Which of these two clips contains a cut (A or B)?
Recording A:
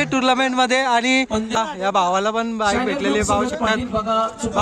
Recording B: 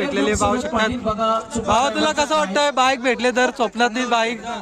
A